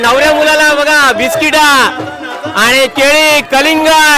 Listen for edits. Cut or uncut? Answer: uncut